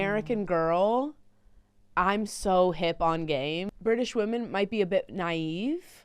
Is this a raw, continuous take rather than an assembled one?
no; 1 cut; at 3.7 s

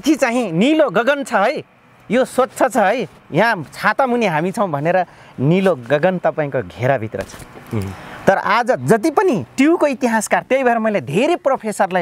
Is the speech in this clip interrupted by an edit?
no; 0 cuts

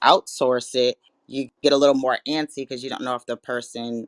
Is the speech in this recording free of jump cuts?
no; 1 cut; at 1.5 s

